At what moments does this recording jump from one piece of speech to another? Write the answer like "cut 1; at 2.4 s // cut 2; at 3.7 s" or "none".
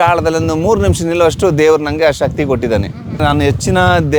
cut 1; at 3.2 s